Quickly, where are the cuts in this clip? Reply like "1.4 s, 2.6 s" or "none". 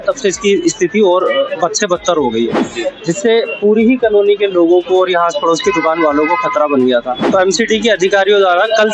7.2 s